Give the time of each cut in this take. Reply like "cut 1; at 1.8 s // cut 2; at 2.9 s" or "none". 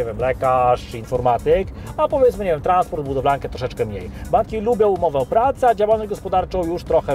none